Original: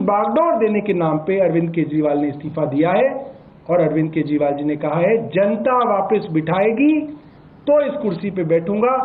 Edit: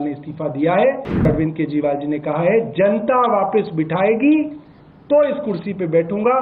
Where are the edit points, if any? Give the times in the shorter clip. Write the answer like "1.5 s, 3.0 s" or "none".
1.2 s